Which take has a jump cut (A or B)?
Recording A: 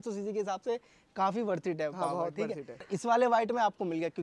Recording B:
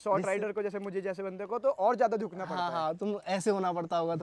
A